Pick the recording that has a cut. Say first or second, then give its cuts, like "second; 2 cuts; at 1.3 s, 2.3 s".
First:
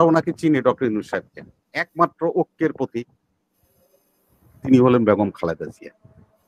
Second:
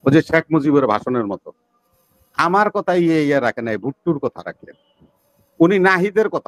first; 1 cut; at 1.9 s